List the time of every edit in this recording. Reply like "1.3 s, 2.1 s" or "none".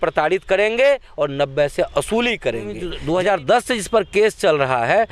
2.9 s